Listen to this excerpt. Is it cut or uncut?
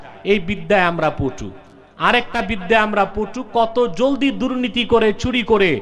uncut